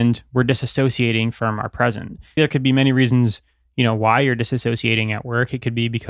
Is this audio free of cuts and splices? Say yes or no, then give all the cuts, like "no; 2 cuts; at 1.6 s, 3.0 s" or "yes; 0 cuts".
no; 1 cut; at 2.4 s